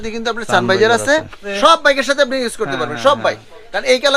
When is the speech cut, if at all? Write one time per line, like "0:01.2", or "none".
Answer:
0:01.5